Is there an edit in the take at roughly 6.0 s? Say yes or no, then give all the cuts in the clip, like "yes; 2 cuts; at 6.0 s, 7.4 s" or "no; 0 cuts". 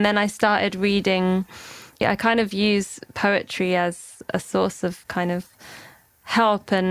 no; 2 cuts; at 2.0 s, 4.1 s